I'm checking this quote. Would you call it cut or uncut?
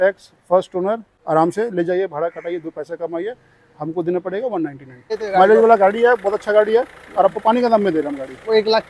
cut